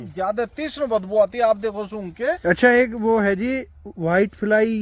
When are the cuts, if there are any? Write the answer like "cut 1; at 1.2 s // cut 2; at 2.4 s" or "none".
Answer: cut 1; at 2.4 s

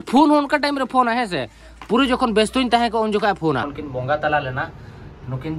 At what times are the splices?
cut 1; at 3.7 s

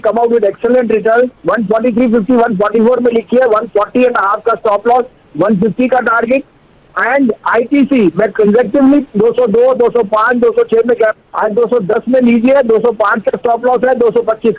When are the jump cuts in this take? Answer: cut 1; at 1.3 s // cut 2; at 11.2 s

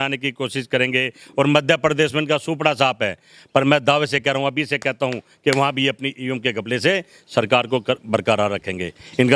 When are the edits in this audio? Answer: none

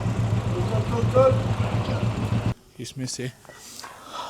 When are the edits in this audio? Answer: cut 1; at 2.5 s

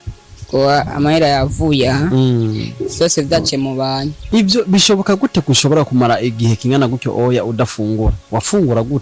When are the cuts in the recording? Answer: cut 1; at 4.1 s

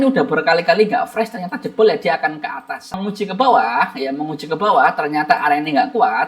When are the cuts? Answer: cut 1; at 3.0 s

